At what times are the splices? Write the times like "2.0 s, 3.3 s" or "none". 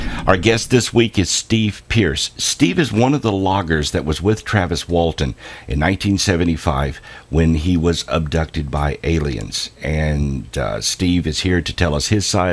none